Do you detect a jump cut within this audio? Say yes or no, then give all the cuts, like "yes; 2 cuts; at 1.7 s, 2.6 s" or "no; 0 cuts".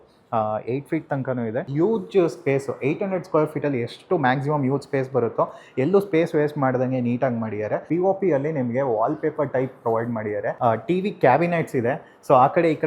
yes; 3 cuts; at 1.7 s, 7.8 s, 10.5 s